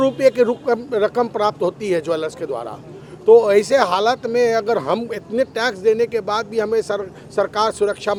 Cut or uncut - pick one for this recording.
uncut